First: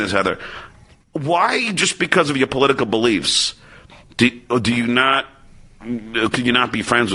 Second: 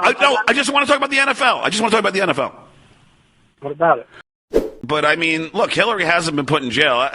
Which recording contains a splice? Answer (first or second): second